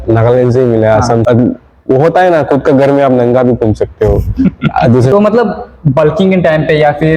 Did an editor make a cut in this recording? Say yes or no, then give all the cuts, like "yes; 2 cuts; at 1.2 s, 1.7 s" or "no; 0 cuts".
yes; 2 cuts; at 1.2 s, 5.1 s